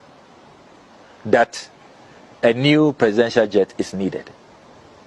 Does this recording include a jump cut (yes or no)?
no